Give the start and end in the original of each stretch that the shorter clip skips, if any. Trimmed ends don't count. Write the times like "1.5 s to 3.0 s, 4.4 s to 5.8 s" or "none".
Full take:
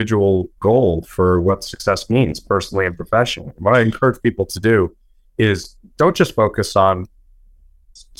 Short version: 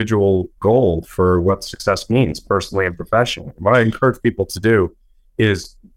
none